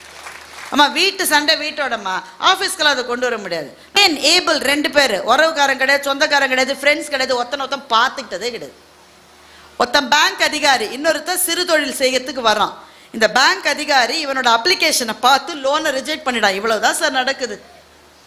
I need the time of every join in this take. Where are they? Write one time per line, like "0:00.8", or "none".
0:04.0